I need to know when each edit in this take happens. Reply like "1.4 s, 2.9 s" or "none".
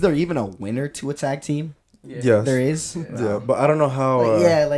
none